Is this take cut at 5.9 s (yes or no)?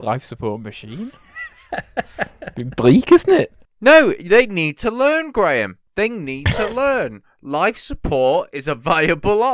no